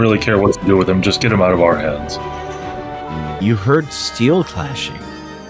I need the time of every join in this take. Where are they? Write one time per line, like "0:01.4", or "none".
0:03.4